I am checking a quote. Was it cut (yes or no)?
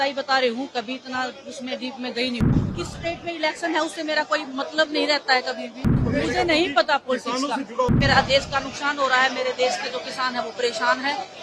yes